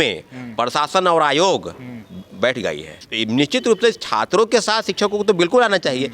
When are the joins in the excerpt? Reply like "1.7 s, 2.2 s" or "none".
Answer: 3.1 s